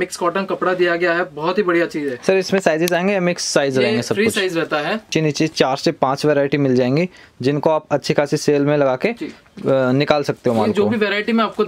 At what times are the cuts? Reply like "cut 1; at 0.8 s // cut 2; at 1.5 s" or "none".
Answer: cut 1; at 5.1 s